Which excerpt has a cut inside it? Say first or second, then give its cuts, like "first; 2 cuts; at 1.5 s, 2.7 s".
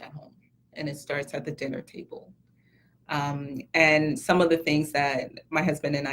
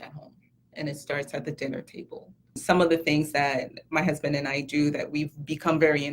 second; 1 cut; at 2.6 s